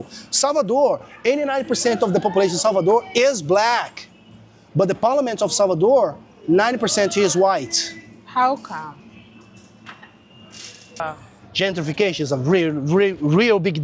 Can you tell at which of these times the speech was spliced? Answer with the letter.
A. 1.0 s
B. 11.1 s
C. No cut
B